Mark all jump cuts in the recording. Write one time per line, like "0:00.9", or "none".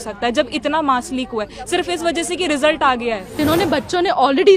0:03.4